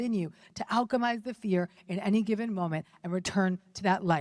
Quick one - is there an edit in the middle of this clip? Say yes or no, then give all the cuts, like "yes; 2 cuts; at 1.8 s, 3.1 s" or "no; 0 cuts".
no; 0 cuts